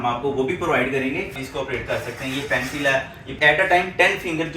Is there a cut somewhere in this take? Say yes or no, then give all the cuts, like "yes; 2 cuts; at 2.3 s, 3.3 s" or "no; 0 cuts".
yes; 2 cuts; at 1.4 s, 3.3 s